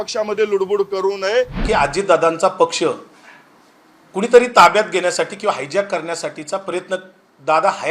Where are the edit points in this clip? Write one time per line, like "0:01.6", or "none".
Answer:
0:01.6